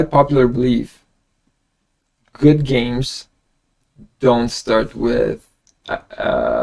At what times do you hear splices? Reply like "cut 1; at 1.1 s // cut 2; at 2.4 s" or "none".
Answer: none